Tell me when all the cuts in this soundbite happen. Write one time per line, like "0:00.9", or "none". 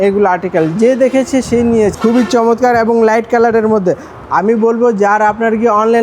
0:01.9

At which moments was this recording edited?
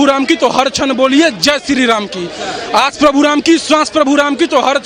none

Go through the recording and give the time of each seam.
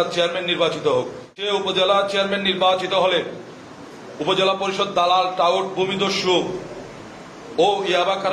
0:01.3

